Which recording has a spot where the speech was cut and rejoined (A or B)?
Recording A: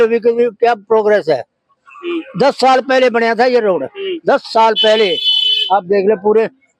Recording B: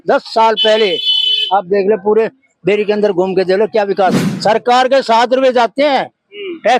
B